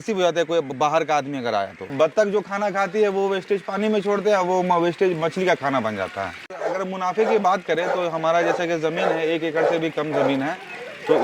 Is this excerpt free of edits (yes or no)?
no